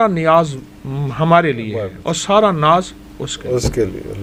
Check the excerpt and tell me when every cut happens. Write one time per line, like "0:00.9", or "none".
none